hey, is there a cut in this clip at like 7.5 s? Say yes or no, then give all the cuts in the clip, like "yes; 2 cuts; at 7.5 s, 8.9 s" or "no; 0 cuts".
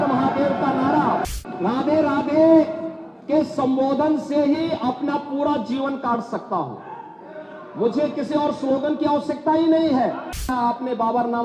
no; 2 cuts; at 1.3 s, 10.4 s